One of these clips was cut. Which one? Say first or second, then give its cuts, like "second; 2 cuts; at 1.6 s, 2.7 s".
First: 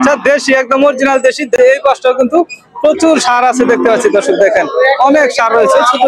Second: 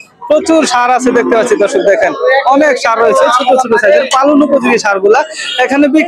first; 1 cut; at 1.6 s